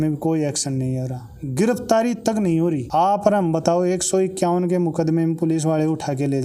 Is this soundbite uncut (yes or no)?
yes